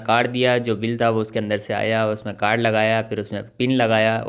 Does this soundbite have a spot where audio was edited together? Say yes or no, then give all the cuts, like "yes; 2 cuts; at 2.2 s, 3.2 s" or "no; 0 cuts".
no; 0 cuts